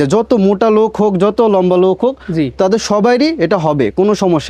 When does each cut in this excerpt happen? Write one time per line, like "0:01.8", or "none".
none